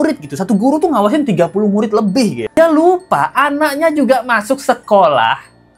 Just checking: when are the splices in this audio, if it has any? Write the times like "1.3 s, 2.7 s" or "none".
2.4 s